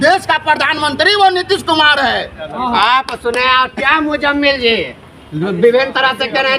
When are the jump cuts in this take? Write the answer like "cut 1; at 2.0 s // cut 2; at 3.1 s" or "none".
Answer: none

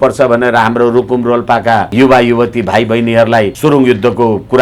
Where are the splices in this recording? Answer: cut 1; at 1.9 s // cut 2; at 3.5 s

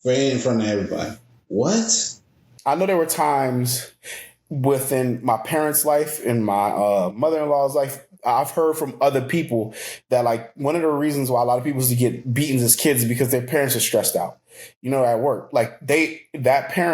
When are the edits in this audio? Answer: cut 1; at 2.4 s

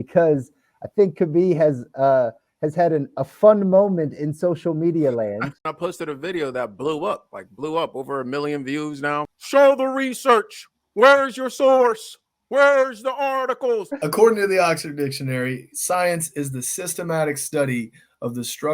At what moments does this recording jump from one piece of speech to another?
cut 1; at 5.6 s // cut 2; at 9.4 s // cut 3; at 13.9 s

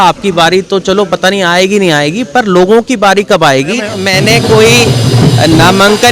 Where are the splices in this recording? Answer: cut 1; at 4.0 s

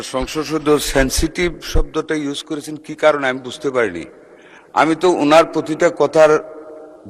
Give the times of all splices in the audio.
none

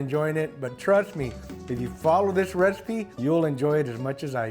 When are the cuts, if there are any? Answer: cut 1; at 3.1 s

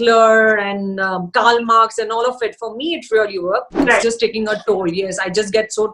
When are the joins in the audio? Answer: cut 1; at 3.8 s

